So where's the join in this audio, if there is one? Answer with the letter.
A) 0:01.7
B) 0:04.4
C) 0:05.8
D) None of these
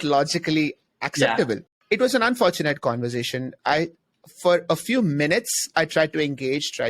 A